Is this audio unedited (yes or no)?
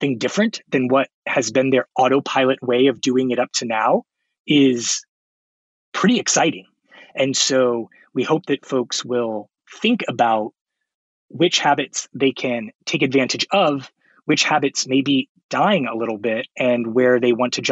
yes